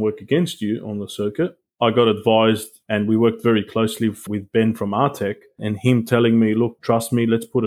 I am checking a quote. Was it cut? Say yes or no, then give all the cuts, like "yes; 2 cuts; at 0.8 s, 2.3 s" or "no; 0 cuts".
yes; 3 cuts; at 4.2 s, 5.7 s, 6.8 s